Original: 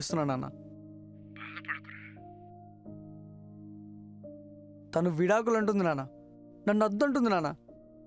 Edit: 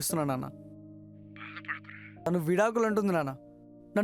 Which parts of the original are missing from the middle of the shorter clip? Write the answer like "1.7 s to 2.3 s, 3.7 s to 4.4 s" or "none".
2.3 s to 5.0 s